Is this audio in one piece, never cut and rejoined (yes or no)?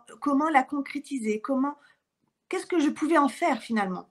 yes